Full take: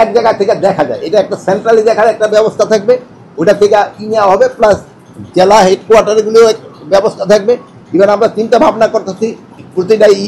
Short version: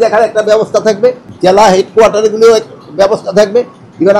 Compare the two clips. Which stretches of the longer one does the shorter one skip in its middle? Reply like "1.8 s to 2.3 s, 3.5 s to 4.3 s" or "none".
3.1 s to 5.2 s